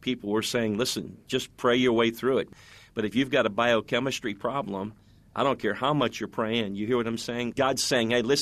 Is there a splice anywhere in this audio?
yes; 2 cuts; at 2.5 s, 7.5 s

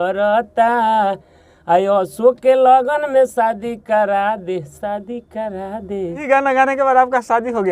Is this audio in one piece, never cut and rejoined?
no; 1 cut; at 6.2 s

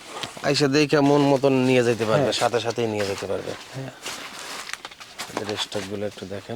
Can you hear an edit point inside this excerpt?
no; 0 cuts

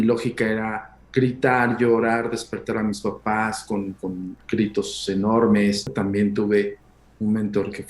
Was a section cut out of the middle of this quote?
yes; 1 cut; at 5.9 s

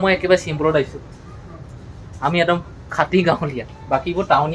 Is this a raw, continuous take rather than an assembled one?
yes; 0 cuts

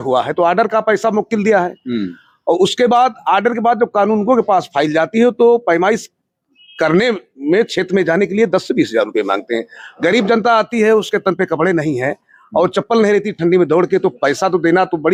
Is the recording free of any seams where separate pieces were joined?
yes; 0 cuts

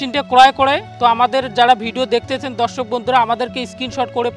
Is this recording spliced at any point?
no; 0 cuts

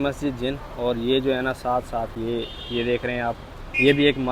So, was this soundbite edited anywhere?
no; 0 cuts

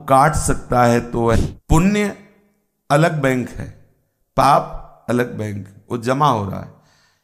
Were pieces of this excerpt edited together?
yes; 1 cut; at 1.4 s

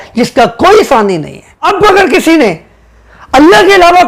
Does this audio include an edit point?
yes; 1 cut; at 1.6 s

